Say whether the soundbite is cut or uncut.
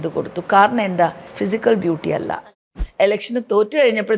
cut